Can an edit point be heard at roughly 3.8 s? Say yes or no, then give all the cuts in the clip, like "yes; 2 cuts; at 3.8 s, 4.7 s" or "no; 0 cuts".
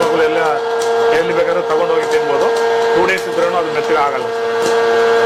no; 0 cuts